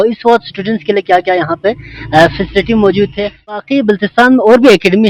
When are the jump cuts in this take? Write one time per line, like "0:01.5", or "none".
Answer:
0:03.6

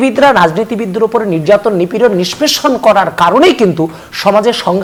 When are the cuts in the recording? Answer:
none

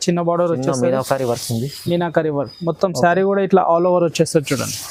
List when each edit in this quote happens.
none

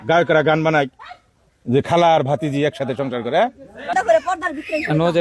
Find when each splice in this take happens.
0:03.9

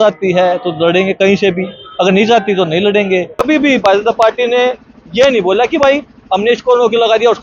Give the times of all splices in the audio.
0:03.4

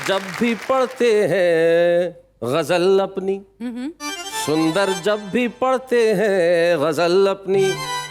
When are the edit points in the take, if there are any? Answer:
none

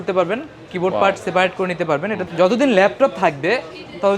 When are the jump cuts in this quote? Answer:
0:02.2

